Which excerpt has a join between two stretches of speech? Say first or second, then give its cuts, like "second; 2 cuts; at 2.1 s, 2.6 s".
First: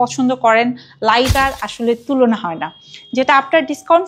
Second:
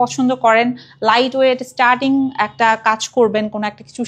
first; 1 cut; at 1.3 s